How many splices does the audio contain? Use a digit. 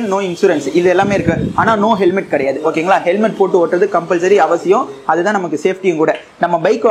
0